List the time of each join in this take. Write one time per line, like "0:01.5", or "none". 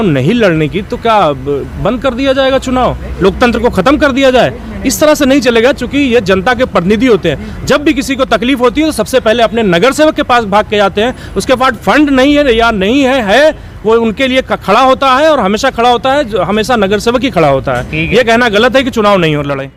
none